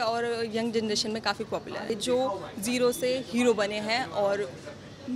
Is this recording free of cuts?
no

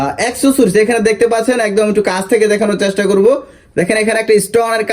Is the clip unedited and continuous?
yes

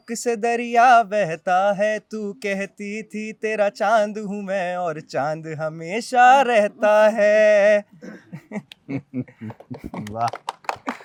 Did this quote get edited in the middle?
no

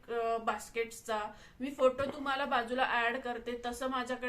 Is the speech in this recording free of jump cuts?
yes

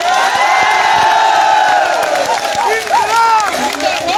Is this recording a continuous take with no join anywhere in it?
yes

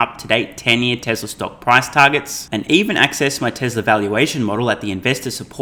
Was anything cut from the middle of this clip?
no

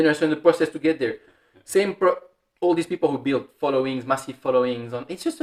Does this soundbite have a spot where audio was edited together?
no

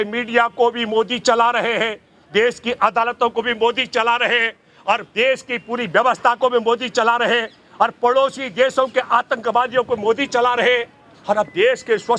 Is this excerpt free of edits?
yes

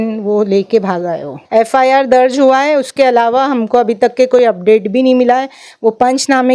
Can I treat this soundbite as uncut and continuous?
no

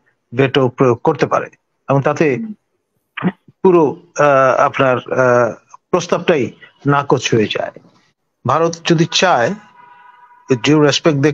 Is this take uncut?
no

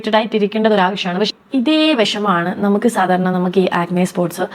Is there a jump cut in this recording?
yes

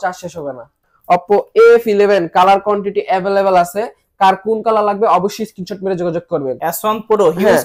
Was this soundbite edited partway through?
yes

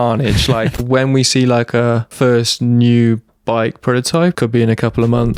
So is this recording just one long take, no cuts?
no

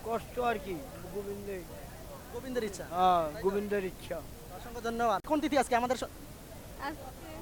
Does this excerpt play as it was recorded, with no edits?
no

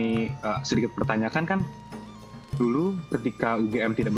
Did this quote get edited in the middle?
no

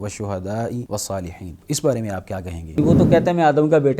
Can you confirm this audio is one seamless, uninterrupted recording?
no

